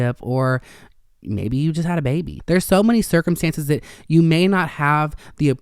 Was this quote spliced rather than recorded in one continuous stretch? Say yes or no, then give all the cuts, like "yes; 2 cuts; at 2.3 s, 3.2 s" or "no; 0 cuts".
yes; 1 cut; at 2.3 s